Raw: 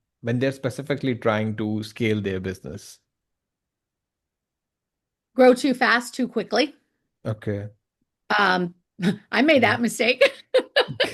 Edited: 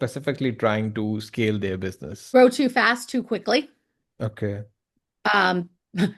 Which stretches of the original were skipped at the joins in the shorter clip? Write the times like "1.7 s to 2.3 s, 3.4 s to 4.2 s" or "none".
2.7 s to 5.2 s